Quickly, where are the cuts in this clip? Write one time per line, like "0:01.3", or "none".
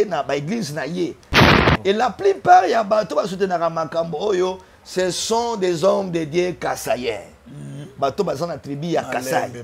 0:01.3

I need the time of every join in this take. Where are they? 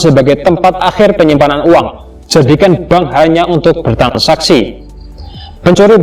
none

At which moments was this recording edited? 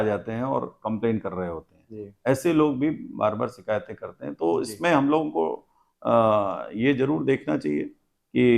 none

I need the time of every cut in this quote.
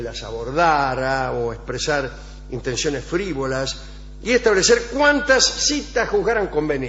0:03.4

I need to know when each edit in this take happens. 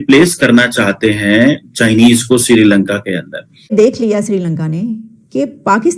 0:03.6

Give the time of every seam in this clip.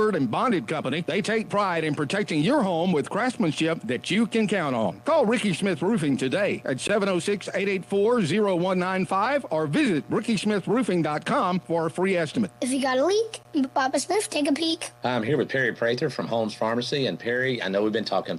0:15.0

